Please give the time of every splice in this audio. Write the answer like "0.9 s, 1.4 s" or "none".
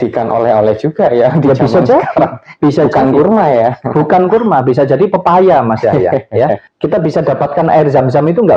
6.7 s